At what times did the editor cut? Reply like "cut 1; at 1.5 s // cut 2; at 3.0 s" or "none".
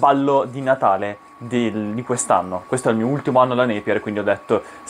none